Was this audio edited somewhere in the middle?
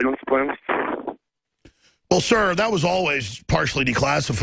no; 0 cuts

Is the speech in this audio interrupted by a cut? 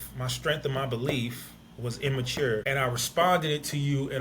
yes; 1 cut; at 2.6 s

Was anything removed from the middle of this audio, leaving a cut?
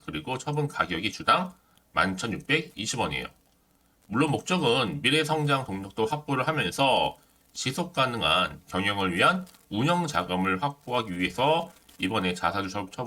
no; 0 cuts

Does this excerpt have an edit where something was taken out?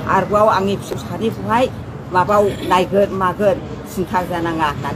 yes; 1 cut; at 1.0 s

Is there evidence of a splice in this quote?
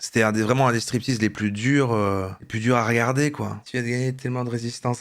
yes; 1 cut; at 3.6 s

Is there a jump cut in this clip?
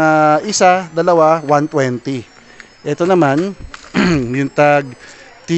no; 0 cuts

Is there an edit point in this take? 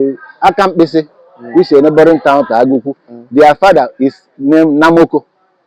no; 0 cuts

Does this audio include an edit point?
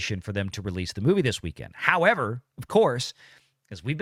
no; 0 cuts

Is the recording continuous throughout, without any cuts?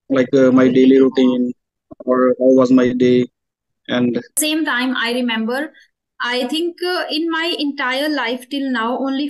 no; 1 cut; at 4.4 s

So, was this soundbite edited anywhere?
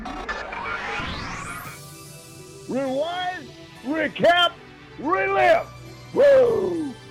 no; 0 cuts

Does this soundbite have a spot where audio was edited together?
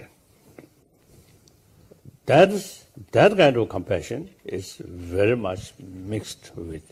no; 0 cuts

